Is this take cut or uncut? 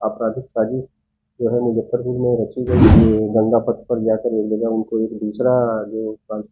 cut